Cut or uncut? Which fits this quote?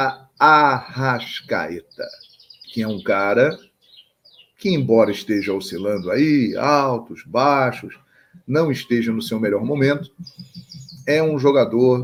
uncut